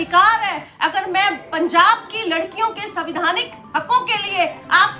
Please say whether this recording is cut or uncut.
uncut